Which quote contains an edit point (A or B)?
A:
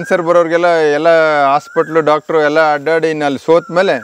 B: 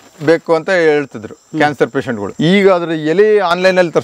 B